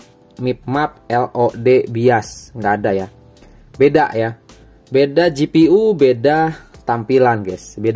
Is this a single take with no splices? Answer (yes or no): yes